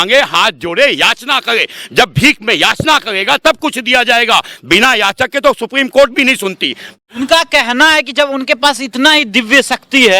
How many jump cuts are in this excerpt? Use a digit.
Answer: 1